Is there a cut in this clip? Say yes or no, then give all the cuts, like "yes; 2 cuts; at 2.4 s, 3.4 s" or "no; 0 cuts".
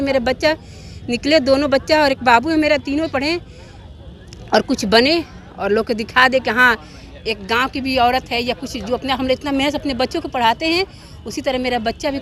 no; 0 cuts